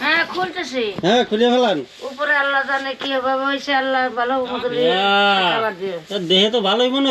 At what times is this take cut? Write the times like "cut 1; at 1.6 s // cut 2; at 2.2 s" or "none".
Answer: none